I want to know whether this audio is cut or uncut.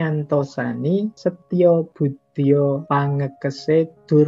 cut